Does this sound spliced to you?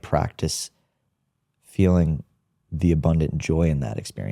no; 0 cuts

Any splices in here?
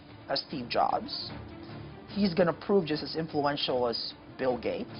no; 0 cuts

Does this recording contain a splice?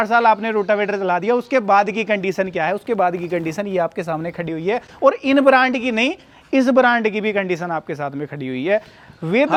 no; 0 cuts

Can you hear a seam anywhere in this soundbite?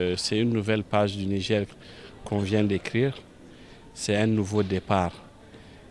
no; 0 cuts

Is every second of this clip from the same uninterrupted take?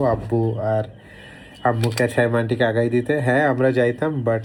yes; 0 cuts

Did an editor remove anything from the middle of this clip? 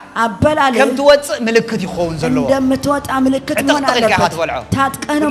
no; 0 cuts

